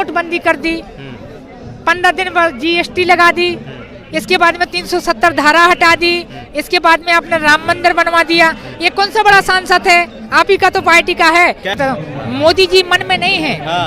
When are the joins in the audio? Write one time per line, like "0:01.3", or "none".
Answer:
0:11.8